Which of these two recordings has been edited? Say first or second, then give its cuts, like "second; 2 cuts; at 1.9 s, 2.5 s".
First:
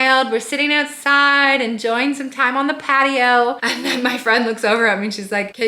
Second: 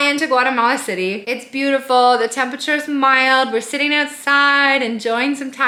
first; 1 cut; at 3.6 s